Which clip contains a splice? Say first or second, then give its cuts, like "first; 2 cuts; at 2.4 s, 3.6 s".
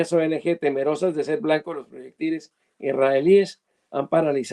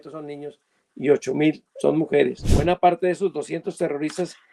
second; 1 cut; at 2.4 s